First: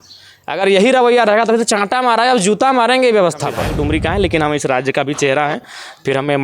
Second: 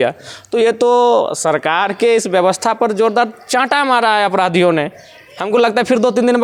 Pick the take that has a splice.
first; 1 cut; at 3.7 s

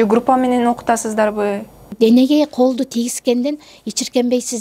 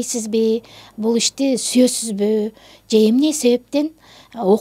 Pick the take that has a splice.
first; 1 cut; at 1.9 s

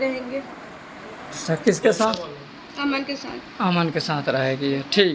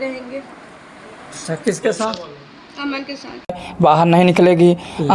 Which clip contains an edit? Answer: second; 1 cut; at 3.6 s

